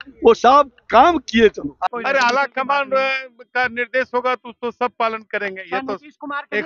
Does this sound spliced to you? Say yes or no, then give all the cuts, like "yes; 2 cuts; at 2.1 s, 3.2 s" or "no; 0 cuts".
yes; 1 cut; at 1.7 s